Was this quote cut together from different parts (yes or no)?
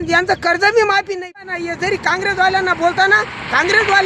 yes